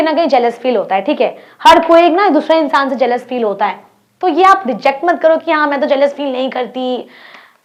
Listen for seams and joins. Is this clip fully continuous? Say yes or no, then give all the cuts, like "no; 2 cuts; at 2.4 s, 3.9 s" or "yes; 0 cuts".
yes; 0 cuts